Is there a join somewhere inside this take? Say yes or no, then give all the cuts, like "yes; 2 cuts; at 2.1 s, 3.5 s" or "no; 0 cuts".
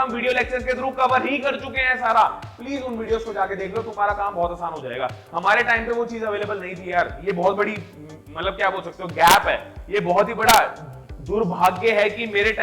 no; 0 cuts